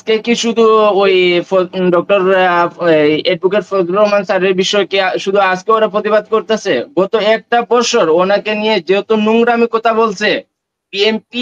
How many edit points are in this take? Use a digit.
0